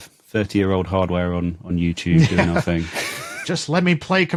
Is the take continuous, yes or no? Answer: yes